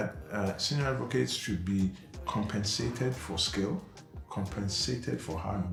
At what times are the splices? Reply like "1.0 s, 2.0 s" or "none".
none